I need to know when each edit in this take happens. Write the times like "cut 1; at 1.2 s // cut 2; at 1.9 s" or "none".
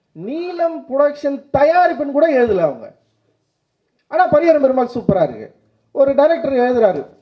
none